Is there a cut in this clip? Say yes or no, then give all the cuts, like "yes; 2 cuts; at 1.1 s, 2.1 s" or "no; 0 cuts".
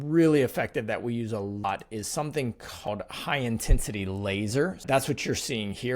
yes; 3 cuts; at 1.6 s, 2.9 s, 4.8 s